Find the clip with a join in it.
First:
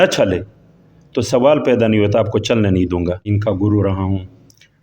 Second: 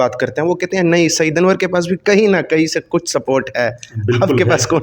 first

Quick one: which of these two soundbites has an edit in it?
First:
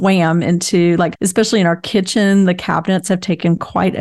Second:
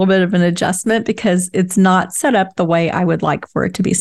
first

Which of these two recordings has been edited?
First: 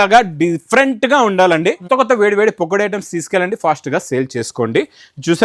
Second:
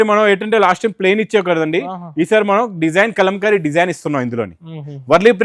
first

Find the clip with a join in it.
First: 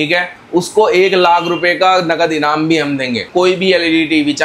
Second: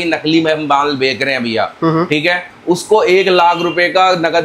first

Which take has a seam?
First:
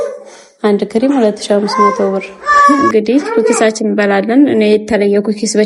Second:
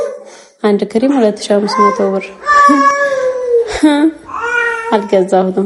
first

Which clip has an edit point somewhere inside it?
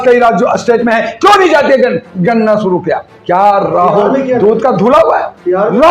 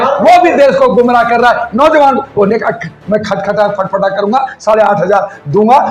first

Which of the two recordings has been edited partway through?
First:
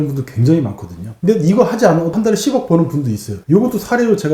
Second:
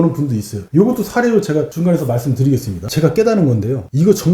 second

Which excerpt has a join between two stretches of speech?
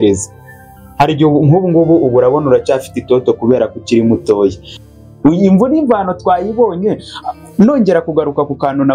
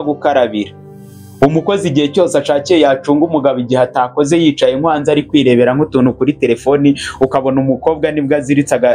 first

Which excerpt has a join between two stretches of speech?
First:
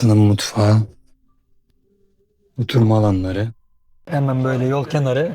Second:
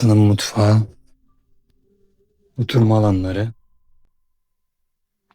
first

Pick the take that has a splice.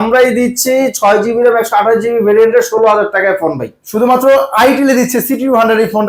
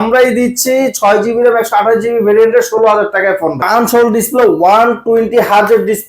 second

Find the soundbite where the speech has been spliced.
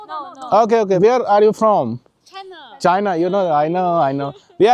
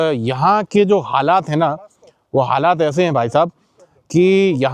first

